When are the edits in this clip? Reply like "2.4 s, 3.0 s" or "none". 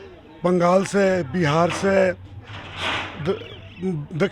none